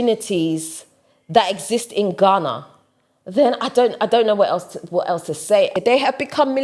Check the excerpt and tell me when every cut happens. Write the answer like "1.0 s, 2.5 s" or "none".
5.7 s